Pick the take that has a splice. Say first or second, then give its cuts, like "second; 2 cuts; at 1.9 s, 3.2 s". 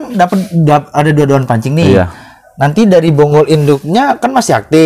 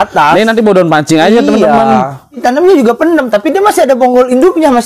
second; 1 cut; at 2.4 s